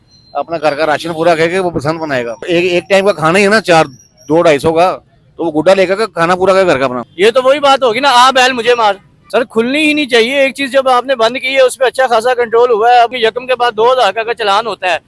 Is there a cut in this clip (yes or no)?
yes